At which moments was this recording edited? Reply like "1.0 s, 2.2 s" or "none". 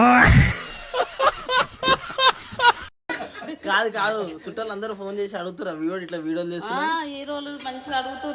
none

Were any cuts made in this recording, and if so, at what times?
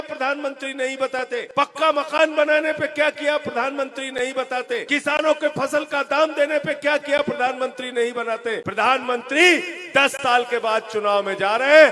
1.5 s, 4.9 s, 8.6 s

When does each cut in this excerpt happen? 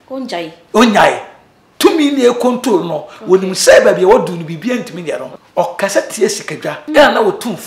5.3 s, 6.8 s

